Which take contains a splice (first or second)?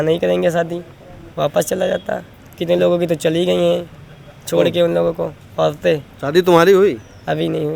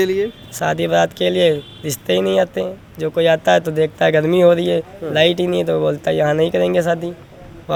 first